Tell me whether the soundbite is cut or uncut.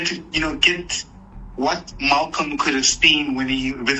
uncut